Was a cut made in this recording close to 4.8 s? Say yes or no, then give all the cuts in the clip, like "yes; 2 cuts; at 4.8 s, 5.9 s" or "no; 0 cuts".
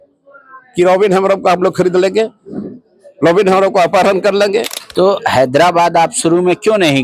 yes; 1 cut; at 4.8 s